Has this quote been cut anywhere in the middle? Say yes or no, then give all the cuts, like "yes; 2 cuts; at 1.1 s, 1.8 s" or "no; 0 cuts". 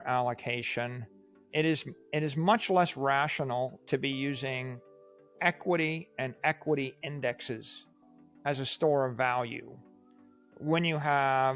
yes; 1 cut; at 1.3 s